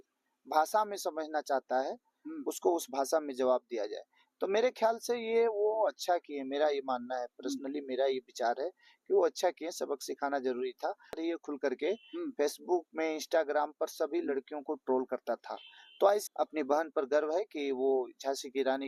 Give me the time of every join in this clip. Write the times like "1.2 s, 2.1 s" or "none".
11.2 s, 16.2 s